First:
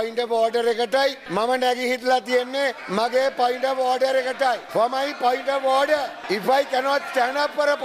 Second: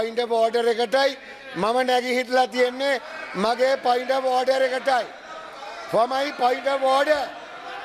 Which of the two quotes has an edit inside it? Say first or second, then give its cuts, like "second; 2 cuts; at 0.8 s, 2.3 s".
first; 4 cuts; at 1.2 s, 2.8 s, 4.6 s, 6.2 s